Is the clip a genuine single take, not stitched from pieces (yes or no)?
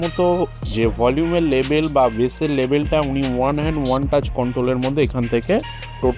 yes